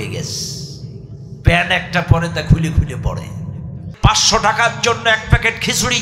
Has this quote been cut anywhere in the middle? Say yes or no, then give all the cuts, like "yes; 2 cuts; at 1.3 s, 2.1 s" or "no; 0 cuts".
yes; 1 cut; at 3.8 s